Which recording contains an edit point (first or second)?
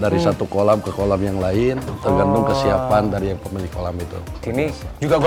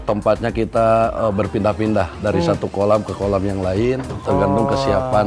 first